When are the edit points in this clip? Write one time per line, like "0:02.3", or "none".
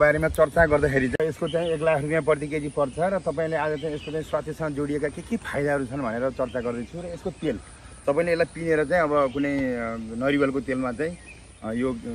0:01.2